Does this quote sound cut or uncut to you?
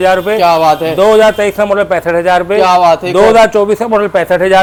uncut